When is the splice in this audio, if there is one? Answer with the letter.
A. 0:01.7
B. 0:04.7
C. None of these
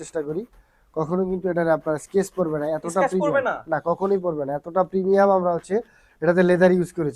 C